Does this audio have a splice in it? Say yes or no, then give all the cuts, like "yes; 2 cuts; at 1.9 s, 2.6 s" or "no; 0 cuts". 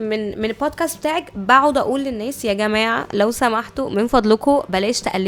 no; 0 cuts